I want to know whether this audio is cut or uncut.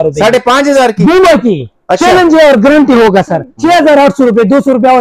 cut